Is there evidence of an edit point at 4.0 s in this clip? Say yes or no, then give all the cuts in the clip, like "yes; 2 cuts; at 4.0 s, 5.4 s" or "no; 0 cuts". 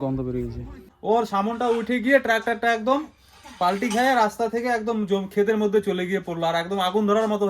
no; 1 cut; at 0.9 s